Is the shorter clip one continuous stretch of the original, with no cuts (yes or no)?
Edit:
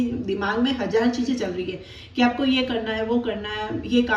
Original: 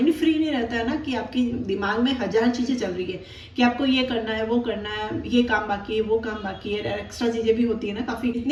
yes